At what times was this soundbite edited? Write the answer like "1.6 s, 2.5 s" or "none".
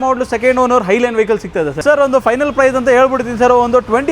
1.8 s

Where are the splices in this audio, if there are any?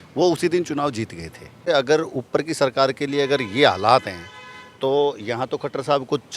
1.6 s

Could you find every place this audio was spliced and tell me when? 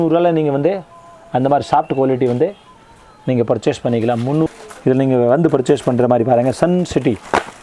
4.4 s

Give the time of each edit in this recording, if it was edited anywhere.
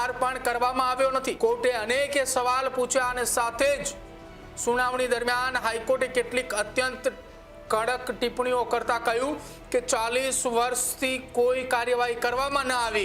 1.4 s

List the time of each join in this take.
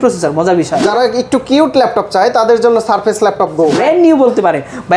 0.8 s, 3.8 s

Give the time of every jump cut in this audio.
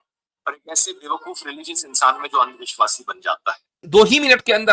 3.8 s

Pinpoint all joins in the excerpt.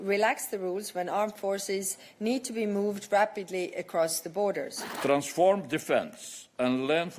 4.8 s

